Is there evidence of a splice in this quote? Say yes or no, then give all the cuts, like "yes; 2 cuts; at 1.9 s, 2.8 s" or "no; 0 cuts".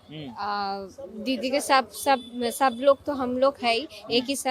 no; 0 cuts